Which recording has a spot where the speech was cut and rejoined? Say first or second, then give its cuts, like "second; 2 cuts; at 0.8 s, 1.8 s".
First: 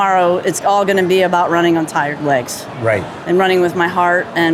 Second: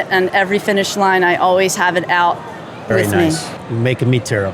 second; 1 cut; at 3.5 s